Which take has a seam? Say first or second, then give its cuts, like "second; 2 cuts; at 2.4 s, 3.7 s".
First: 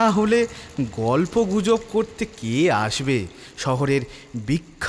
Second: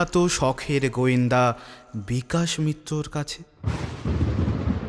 second; 1 cut; at 3.5 s